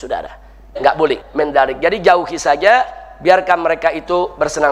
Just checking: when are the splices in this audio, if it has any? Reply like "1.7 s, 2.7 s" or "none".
1.2 s